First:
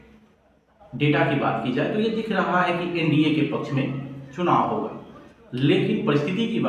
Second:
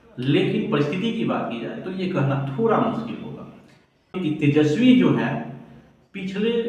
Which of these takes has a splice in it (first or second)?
second